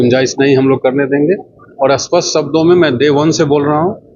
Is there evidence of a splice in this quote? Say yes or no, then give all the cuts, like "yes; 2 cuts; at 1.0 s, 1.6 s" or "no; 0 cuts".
no; 0 cuts